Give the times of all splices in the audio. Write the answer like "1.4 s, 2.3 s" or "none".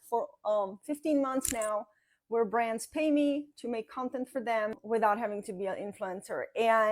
4.8 s